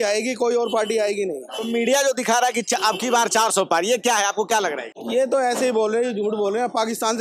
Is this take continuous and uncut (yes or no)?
yes